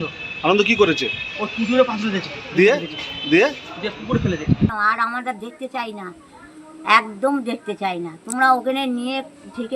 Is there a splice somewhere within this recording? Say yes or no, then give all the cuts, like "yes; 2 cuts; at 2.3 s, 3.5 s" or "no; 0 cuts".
yes; 1 cut; at 4.7 s